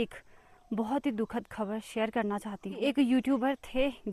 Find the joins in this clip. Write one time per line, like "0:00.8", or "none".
0:02.8

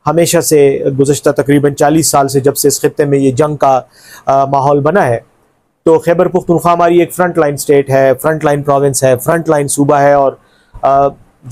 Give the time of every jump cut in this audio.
none

